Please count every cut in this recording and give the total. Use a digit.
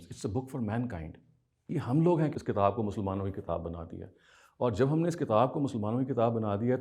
1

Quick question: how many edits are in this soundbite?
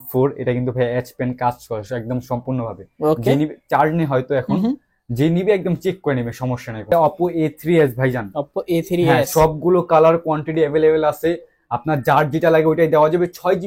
1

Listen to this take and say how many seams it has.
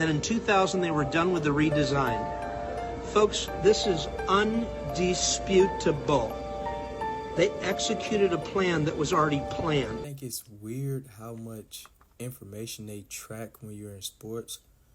1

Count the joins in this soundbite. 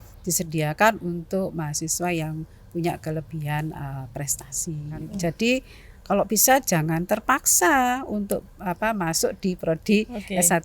1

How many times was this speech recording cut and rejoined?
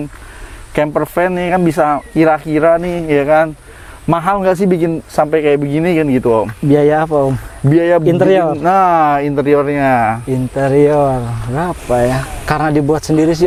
0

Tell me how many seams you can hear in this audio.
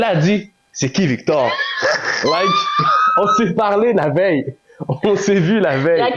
0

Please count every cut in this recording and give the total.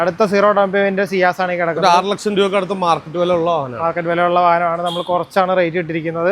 0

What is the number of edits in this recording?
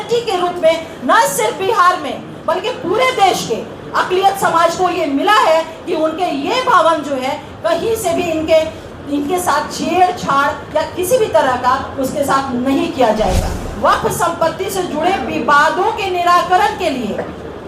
1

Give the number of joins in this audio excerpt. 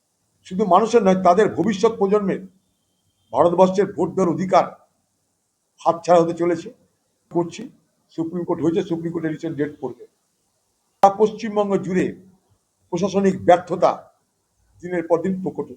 2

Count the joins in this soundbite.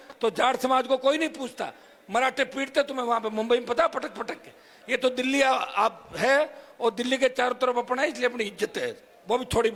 0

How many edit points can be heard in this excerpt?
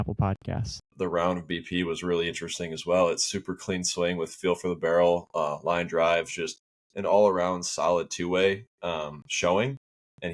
1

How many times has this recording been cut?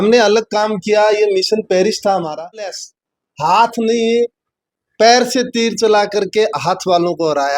1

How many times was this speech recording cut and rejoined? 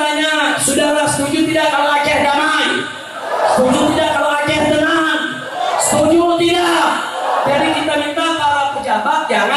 0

